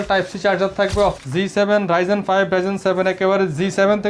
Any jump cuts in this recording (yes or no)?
yes